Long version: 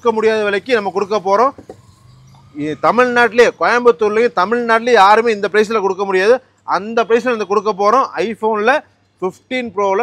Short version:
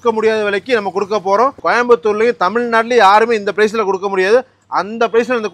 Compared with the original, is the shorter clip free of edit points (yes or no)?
no